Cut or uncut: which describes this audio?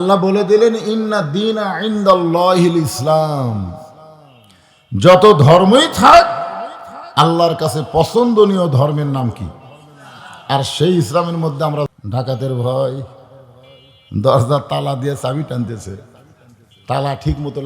cut